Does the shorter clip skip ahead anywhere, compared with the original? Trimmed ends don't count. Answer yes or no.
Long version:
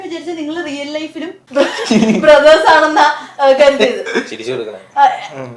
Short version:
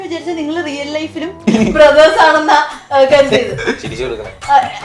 yes